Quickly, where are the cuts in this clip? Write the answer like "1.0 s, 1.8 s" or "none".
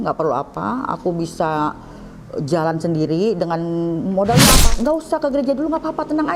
4.6 s